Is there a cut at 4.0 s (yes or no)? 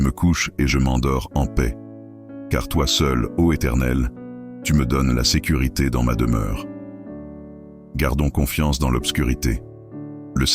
no